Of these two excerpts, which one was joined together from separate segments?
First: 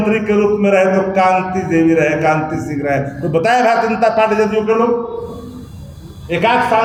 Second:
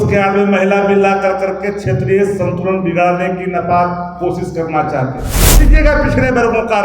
second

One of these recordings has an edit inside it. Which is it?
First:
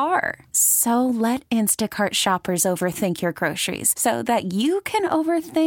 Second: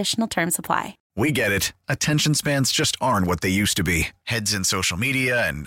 second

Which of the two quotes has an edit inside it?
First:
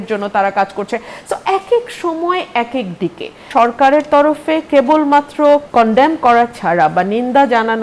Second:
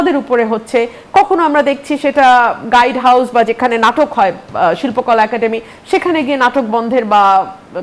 first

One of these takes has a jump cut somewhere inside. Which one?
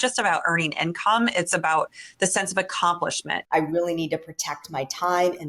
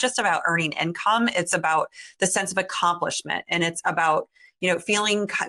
first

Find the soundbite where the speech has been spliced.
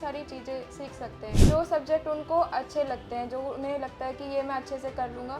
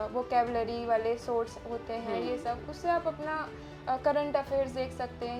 first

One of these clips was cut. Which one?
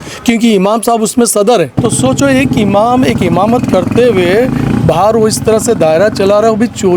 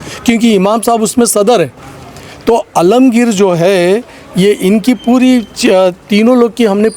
first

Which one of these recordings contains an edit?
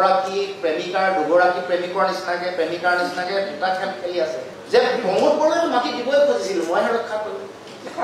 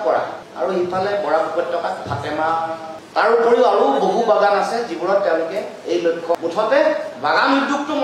second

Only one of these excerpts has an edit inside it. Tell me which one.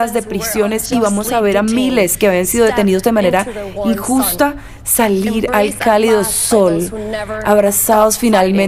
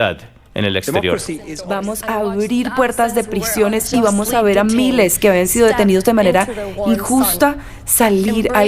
second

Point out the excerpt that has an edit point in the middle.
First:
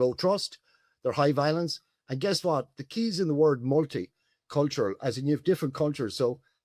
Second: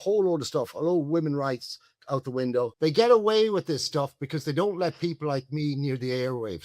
second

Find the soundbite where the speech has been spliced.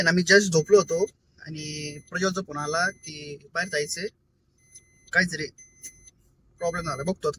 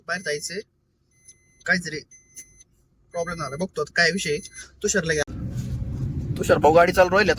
second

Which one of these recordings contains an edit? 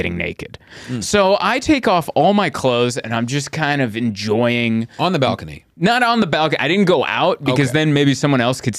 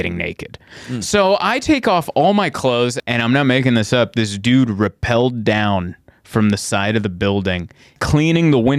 second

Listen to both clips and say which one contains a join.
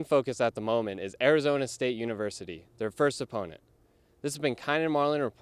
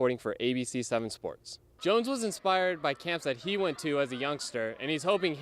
second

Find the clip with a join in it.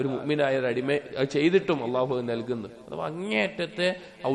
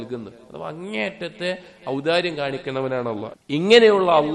second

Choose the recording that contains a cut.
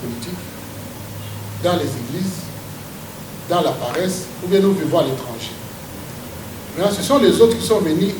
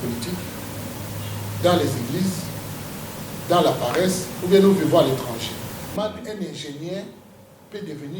second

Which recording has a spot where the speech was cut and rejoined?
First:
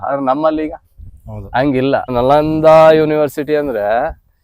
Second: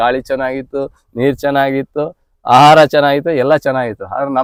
first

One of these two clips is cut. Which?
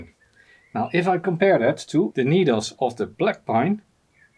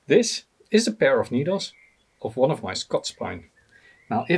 first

